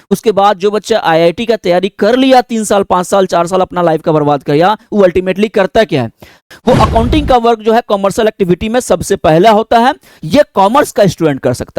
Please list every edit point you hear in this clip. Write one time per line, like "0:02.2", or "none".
0:06.4